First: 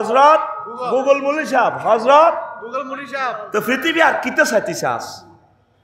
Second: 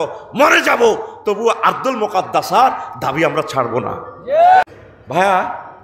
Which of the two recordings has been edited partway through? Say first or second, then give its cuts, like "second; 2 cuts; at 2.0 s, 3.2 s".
second; 1 cut; at 4.7 s